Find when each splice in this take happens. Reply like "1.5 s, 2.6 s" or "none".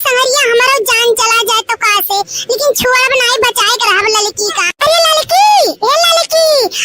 2.9 s